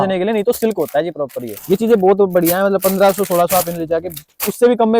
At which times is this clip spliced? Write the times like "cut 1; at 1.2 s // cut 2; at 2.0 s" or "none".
cut 1; at 1.5 s